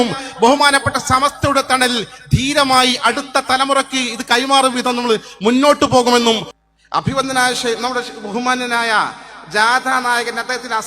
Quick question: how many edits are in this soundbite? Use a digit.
1